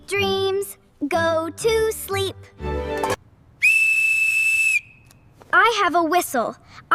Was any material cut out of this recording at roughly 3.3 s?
no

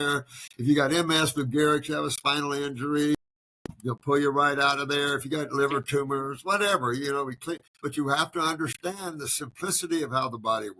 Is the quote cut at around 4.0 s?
no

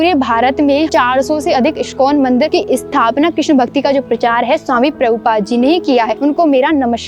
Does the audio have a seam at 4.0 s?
no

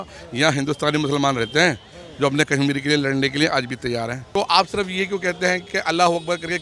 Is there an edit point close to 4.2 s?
yes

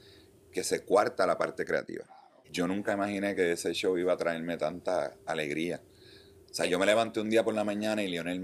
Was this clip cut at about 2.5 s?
yes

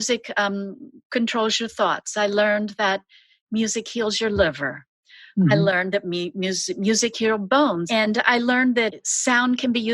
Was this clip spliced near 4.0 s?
no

